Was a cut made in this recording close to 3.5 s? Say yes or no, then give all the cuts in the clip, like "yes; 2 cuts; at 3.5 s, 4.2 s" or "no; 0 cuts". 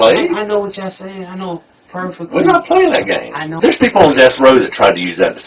yes; 1 cut; at 3.5 s